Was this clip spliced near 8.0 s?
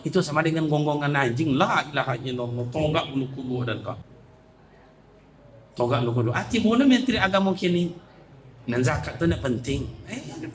no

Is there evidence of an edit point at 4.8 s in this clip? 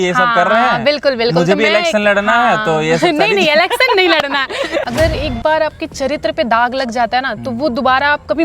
yes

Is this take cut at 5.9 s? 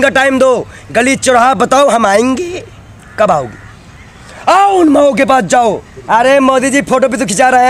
yes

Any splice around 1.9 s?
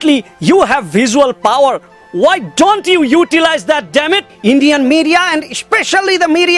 no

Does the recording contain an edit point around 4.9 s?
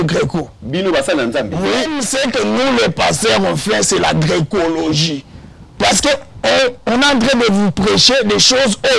no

